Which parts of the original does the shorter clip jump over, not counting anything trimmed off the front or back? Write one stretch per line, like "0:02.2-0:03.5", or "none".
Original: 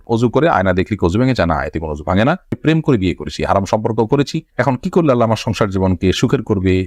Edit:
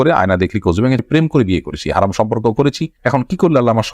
0:01.4-0:02.5